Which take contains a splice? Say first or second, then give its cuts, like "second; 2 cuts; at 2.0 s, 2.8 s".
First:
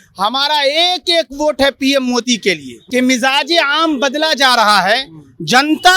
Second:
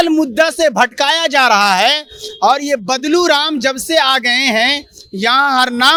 first; 1 cut; at 2.7 s